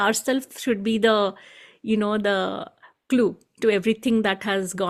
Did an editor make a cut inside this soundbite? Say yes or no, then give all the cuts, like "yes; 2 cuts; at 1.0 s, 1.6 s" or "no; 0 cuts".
no; 0 cuts